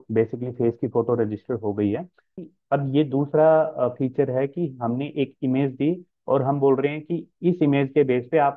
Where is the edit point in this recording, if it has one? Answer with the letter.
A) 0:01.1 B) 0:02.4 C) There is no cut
B